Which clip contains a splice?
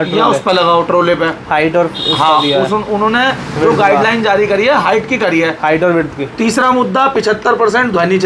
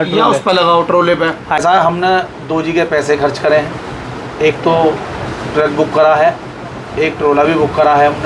second; 1 cut; at 1.6 s

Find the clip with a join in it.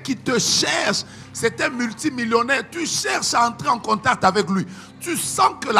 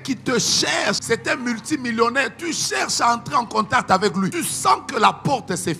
second; 2 cuts; at 1.0 s, 4.4 s

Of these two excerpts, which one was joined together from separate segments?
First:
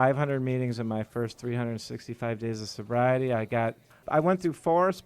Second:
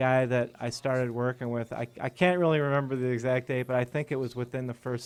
first; 1 cut; at 4.0 s

